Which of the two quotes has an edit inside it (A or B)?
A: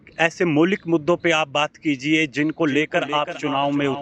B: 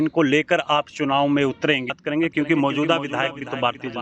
B